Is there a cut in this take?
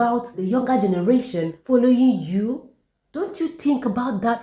no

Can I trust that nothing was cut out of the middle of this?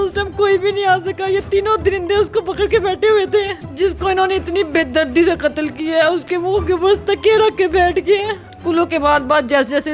no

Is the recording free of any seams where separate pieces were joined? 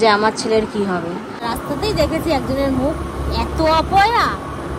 no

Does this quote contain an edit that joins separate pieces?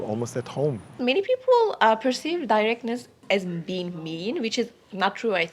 yes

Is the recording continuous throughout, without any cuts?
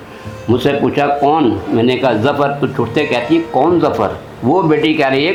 yes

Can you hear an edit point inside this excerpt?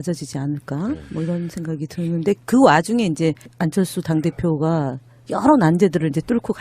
yes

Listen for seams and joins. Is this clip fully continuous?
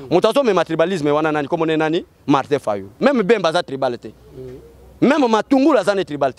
no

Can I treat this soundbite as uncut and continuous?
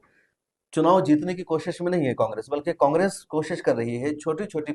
yes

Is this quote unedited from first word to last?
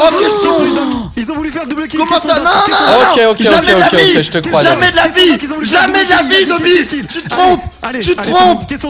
yes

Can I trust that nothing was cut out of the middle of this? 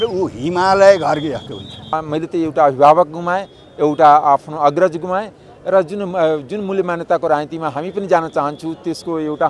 no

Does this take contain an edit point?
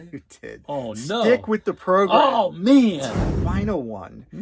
yes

